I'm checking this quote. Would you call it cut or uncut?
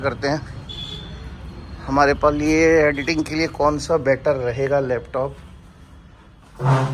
uncut